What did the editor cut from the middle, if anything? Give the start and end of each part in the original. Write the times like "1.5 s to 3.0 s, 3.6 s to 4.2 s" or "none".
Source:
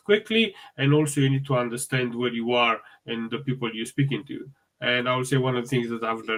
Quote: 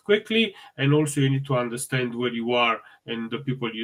none